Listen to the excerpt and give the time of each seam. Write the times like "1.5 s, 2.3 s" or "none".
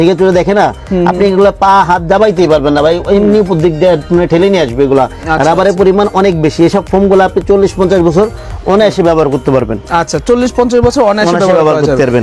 none